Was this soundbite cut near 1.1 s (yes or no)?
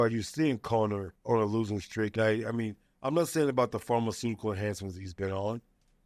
yes